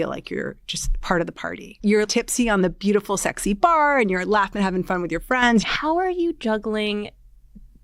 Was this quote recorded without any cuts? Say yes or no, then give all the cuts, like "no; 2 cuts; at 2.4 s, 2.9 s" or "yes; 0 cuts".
no; 2 cuts; at 2.1 s, 5.7 s